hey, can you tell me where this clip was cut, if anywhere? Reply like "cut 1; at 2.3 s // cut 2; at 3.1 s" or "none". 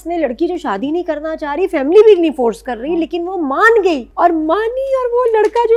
cut 1; at 4.1 s